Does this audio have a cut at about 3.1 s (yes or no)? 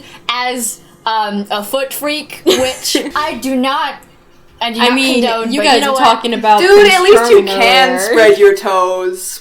yes